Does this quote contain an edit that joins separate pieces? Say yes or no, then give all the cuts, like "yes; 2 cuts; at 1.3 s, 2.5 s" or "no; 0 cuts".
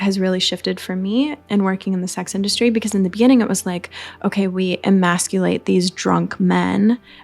yes; 1 cut; at 1.4 s